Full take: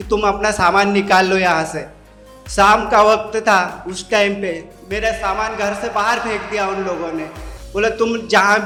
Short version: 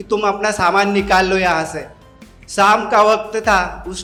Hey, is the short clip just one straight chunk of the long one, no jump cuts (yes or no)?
yes